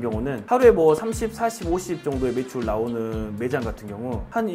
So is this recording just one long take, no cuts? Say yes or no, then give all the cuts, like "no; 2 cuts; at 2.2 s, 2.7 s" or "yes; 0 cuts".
yes; 0 cuts